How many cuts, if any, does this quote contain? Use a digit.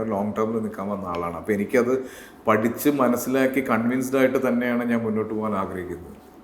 0